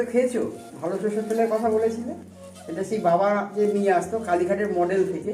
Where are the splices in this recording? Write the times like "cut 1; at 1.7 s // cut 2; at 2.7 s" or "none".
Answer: none